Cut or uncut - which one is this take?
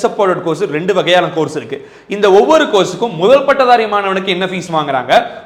uncut